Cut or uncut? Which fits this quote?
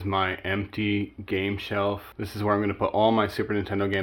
uncut